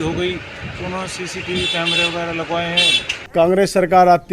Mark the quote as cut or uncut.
cut